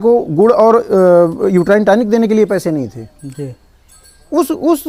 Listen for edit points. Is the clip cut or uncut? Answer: uncut